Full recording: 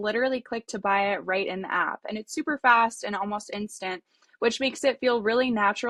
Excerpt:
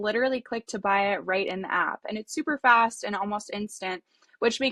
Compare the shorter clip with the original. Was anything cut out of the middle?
no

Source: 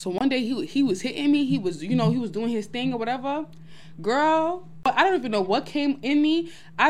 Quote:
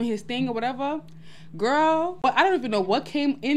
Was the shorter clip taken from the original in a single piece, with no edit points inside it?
no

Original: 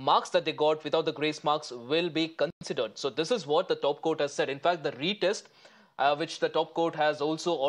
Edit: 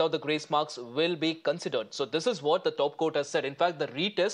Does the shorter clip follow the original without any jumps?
no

